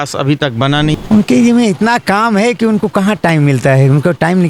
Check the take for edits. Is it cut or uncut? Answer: cut